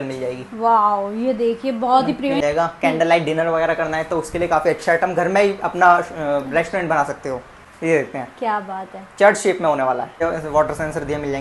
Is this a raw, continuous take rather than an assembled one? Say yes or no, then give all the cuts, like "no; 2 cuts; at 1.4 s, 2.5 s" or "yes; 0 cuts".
no; 3 cuts; at 2.4 s, 7.5 s, 10.2 s